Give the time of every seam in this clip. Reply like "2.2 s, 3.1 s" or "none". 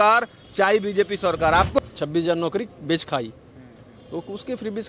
1.8 s